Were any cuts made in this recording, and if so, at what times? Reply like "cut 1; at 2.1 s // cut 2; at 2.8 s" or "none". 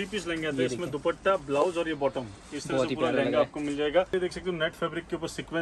cut 1; at 4.1 s